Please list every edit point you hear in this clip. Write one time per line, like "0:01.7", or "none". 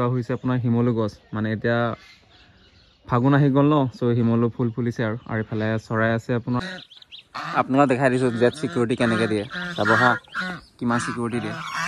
0:06.6